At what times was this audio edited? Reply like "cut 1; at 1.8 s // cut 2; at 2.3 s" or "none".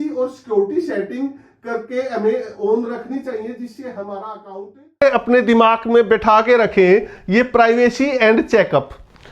cut 1; at 5.0 s